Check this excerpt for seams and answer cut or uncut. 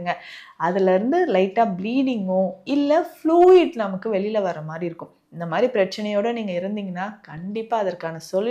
uncut